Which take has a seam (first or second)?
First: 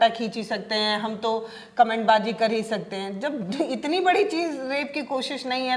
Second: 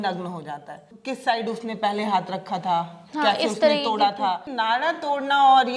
second